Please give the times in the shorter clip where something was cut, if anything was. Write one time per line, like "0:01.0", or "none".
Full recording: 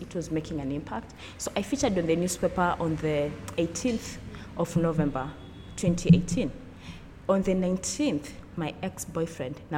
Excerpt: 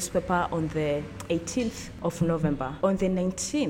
0:01.9
0:02.7